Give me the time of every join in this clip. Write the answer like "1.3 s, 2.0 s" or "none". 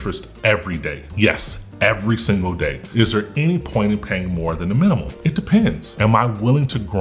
1.0 s, 2.8 s, 5.1 s, 5.9 s